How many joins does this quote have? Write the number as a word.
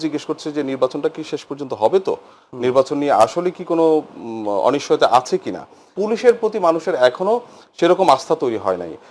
one